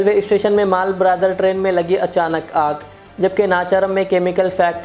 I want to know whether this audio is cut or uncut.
uncut